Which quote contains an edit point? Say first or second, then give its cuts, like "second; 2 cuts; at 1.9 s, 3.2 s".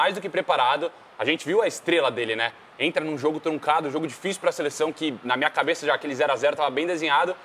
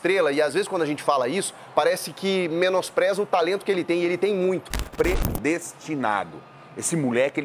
second; 1 cut; at 4.9 s